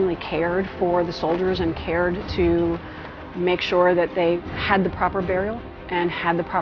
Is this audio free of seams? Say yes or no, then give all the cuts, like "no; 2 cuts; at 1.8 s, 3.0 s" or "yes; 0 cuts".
no; 1 cut; at 4.4 s